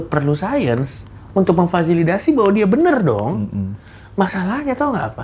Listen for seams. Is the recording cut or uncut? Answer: uncut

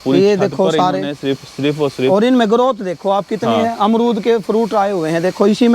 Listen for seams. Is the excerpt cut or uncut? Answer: uncut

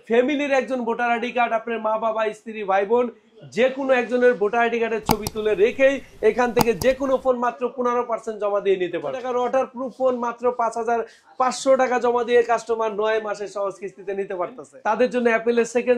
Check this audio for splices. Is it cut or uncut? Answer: cut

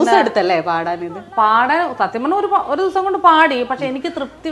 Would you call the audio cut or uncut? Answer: uncut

